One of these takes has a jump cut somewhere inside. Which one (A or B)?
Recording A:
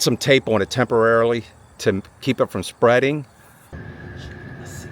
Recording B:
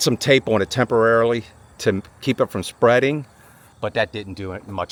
A